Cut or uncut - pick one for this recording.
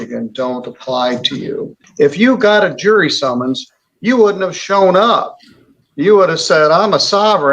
cut